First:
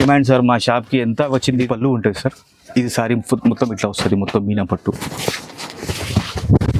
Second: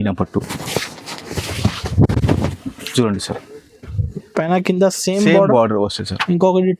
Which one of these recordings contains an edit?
first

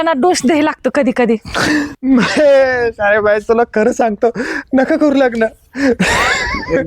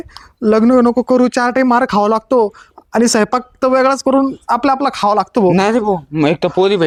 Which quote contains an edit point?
first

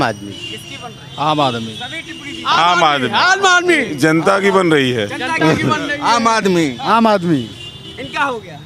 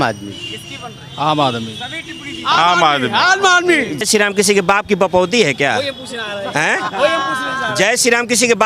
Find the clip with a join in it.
second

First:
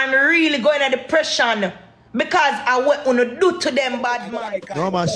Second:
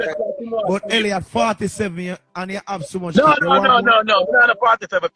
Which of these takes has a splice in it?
first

